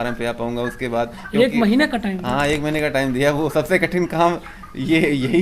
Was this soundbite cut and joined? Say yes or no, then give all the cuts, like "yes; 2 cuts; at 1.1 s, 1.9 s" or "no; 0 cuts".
no; 0 cuts